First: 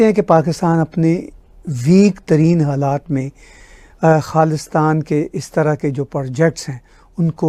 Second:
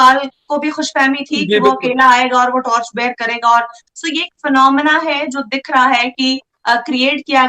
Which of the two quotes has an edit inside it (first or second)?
second